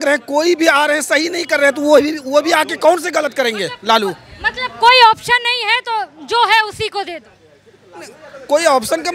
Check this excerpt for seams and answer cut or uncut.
uncut